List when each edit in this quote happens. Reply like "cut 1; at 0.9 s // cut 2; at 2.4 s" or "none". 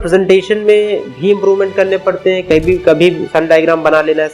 none